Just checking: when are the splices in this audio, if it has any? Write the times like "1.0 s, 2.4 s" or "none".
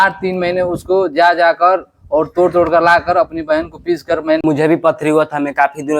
4.4 s